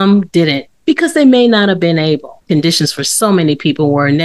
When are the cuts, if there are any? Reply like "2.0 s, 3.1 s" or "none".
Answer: 2.3 s